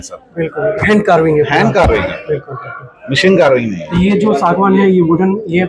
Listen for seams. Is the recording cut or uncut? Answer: uncut